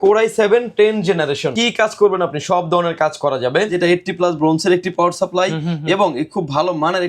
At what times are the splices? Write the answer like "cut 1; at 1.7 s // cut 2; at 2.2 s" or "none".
cut 1; at 1.5 s // cut 2; at 3.7 s